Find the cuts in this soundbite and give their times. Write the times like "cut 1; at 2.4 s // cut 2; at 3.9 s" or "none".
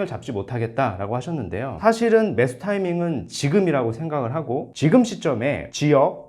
cut 1; at 4.7 s

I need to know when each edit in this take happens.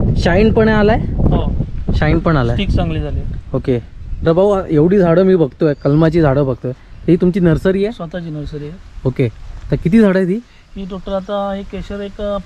cut 1; at 4.3 s

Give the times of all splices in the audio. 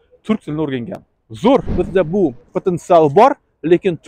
cut 1; at 1.7 s

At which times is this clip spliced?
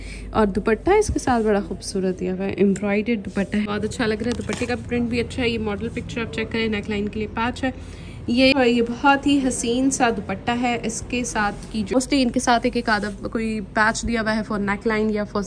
cut 1; at 3.7 s // cut 2; at 8.5 s // cut 3; at 11.9 s

